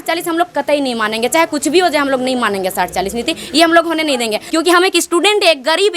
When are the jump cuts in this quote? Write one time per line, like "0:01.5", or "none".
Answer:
0:04.4

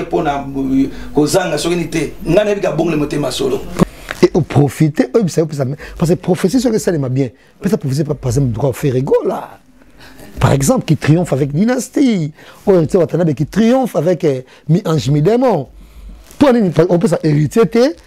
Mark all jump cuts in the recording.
0:03.8

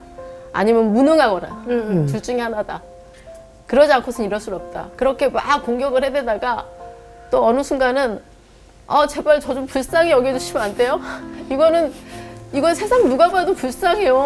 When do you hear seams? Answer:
0:04.9

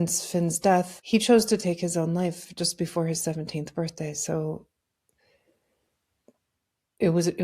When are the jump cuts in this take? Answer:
0:01.0

